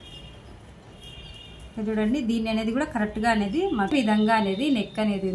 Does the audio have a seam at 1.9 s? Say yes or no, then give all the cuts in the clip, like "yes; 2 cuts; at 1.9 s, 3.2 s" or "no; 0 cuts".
no; 1 cut; at 3.9 s